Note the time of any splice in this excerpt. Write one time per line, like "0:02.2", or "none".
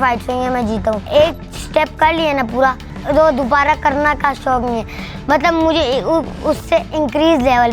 0:01.1
0:02.9